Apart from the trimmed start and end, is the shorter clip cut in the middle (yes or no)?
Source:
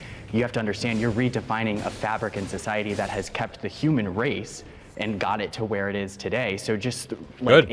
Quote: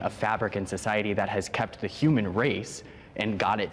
no